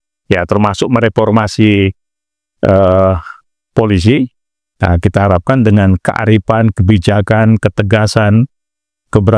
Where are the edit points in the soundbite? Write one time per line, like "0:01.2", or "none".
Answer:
none

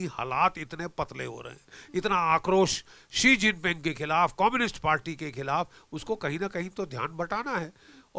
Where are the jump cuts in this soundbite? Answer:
none

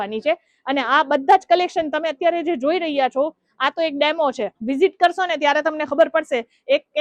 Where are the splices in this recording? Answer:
none

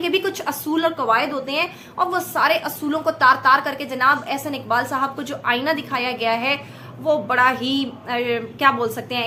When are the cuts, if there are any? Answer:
none

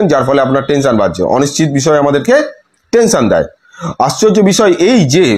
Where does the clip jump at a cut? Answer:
none

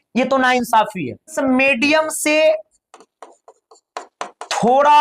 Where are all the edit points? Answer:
0:01.3

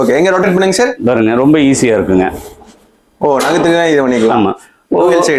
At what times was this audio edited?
none

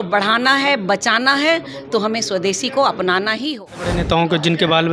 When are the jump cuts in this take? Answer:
0:04.0

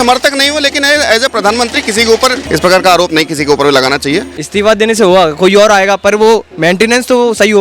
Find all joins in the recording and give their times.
0:02.4
0:04.3

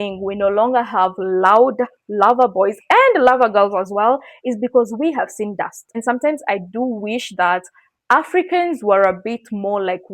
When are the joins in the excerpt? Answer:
0:06.0

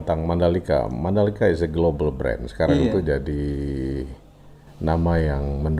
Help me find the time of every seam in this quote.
none

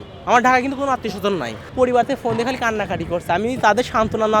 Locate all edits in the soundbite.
0:01.6

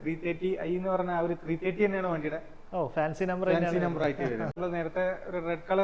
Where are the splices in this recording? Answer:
0:04.6

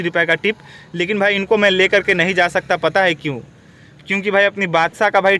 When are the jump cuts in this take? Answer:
none

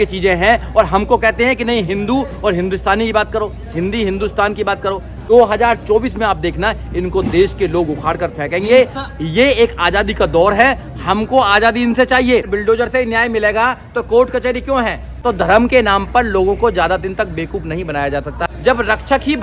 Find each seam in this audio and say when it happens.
0:05.1
0:12.5
0:15.1
0:18.5

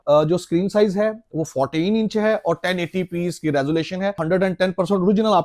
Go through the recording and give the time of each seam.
0:04.2

